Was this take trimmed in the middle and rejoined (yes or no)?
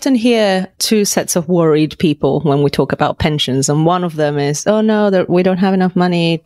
no